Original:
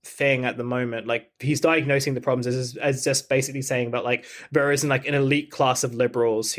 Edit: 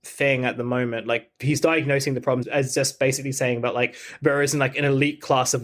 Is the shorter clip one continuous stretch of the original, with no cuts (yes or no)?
no